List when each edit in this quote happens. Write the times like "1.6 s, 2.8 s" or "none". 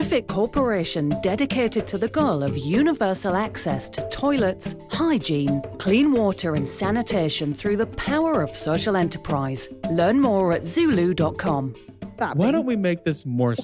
12.1 s

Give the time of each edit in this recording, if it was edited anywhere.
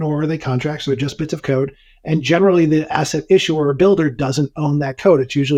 none

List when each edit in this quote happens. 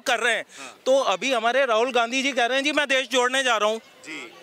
none

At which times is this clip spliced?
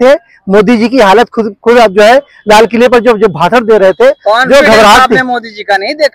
none

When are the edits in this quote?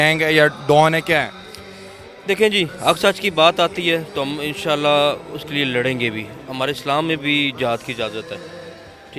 none

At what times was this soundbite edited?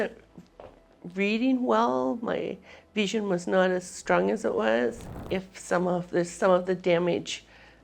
5.1 s

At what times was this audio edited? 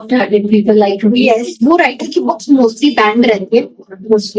1.5 s

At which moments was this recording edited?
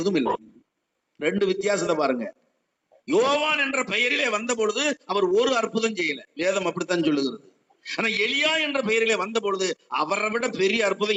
none

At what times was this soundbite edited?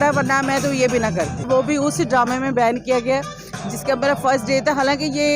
1.5 s

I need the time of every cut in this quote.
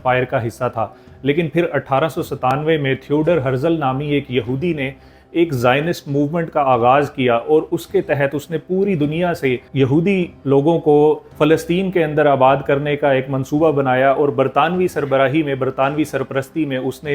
none

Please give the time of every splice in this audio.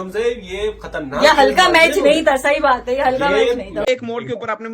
3.8 s

